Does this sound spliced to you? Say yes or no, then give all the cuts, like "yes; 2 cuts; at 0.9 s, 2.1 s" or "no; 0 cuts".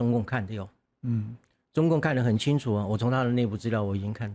no; 0 cuts